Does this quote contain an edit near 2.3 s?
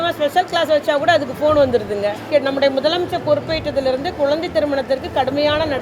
yes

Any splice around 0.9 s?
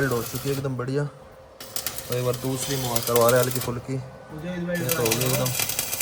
no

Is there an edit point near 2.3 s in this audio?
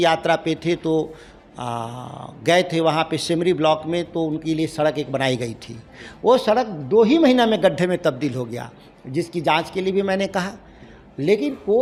no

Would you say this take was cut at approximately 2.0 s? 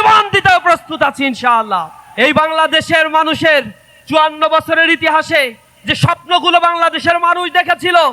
yes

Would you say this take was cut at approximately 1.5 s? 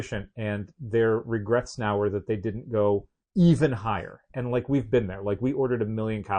no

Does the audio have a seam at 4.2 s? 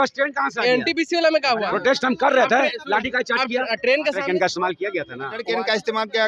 yes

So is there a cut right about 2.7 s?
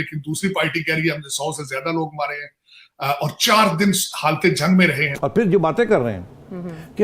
no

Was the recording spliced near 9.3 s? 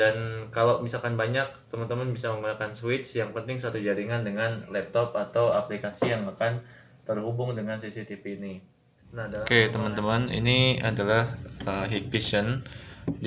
yes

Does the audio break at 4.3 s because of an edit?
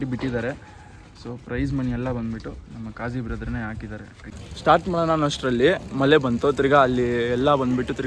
yes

